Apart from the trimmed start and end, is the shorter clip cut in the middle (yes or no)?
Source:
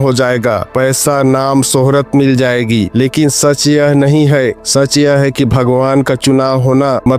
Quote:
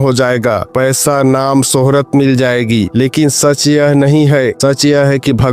yes